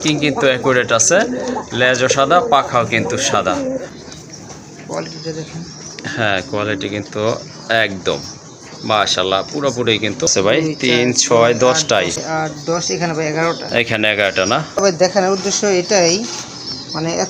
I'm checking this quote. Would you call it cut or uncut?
cut